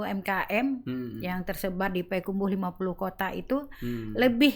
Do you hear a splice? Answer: no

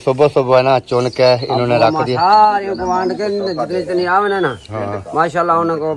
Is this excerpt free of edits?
yes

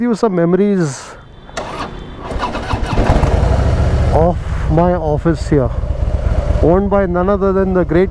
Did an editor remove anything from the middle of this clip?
no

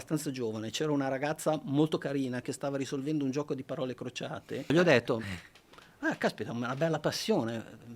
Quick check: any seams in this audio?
yes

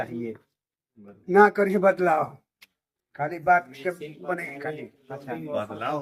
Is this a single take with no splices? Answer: yes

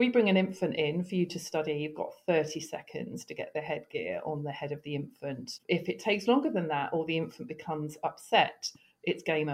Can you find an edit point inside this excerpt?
yes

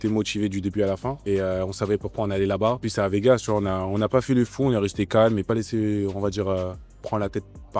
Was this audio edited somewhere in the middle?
yes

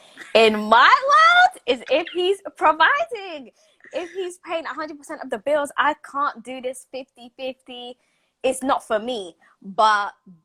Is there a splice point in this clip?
no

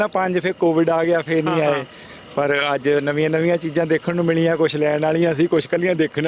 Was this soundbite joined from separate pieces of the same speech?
no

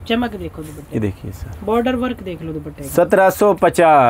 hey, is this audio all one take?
yes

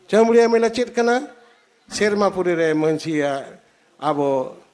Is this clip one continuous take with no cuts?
yes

